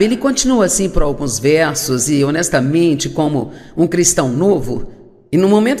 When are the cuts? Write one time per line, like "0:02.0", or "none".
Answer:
0:01.5